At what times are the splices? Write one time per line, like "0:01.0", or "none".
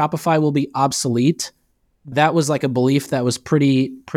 none